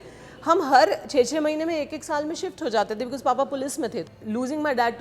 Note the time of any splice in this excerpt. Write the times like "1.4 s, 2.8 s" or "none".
4.0 s